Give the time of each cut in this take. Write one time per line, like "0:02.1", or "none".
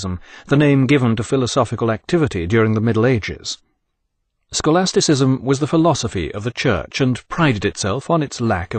none